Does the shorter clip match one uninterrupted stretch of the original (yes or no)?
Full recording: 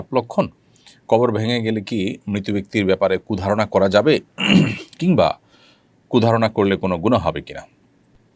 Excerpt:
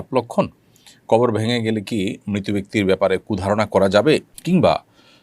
no